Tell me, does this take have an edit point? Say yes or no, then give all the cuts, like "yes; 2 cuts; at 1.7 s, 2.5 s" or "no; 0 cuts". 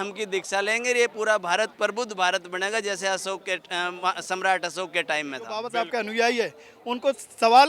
yes; 1 cut; at 5.6 s